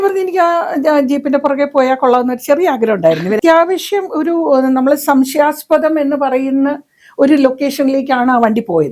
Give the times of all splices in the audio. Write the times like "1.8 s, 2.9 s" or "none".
3.4 s